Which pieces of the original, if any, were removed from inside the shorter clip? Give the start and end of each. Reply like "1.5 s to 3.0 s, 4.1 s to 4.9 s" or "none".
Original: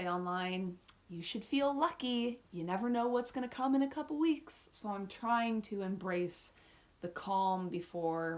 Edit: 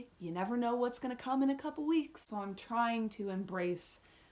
4.6 s to 4.8 s

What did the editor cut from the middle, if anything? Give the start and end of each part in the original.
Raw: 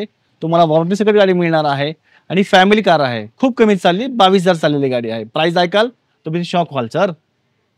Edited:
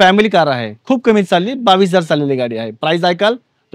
none

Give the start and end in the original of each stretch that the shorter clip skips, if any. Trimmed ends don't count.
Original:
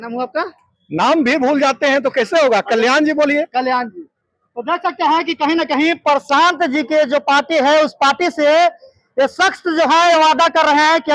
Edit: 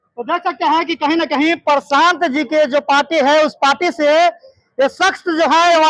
none

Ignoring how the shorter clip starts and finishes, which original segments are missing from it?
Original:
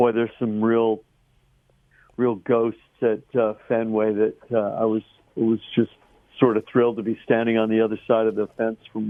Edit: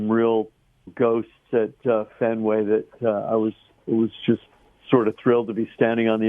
1.4 s to 2.4 s

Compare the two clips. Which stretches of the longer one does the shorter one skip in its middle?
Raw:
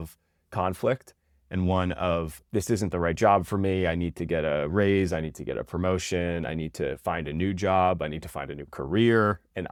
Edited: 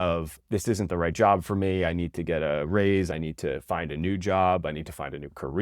5.1 s to 6.5 s

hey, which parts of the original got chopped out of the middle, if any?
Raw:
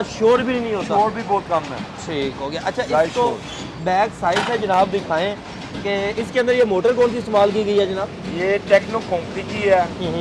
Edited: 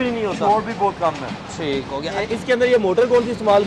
2.7 s to 6.1 s

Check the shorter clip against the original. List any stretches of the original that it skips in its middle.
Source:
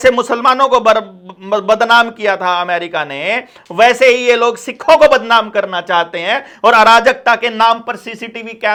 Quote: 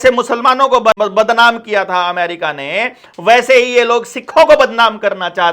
0.9 s to 1.5 s

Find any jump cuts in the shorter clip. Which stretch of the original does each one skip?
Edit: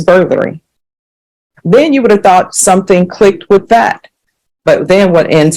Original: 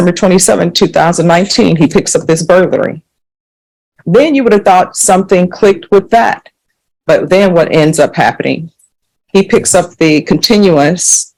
none

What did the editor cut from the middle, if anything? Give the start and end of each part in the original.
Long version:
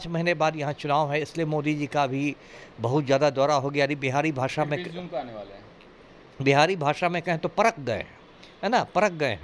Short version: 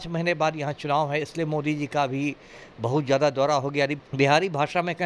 4.0 s to 6.3 s

